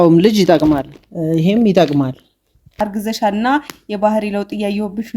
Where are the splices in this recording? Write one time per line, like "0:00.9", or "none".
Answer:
0:02.8